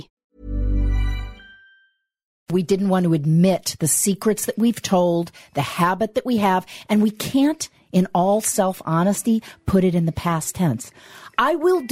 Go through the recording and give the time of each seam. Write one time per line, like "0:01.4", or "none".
0:02.5